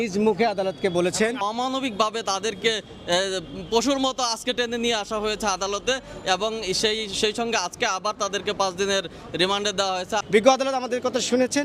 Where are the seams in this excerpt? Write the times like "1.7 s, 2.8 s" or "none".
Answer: 1.4 s, 10.2 s